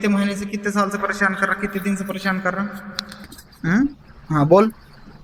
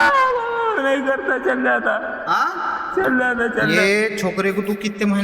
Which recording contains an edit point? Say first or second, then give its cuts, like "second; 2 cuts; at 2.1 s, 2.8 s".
second; 1 cut; at 3.7 s